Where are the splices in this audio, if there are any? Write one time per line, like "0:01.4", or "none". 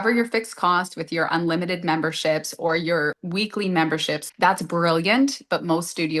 0:03.2
0:04.3